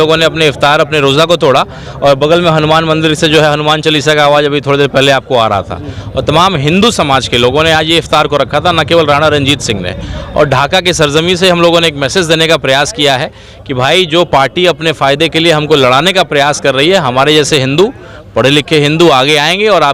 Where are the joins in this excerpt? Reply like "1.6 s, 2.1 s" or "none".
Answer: none